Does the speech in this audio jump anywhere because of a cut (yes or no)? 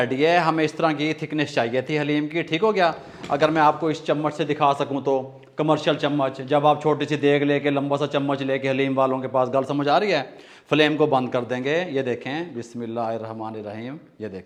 no